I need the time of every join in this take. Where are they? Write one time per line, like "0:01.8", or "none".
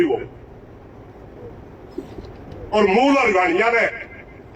none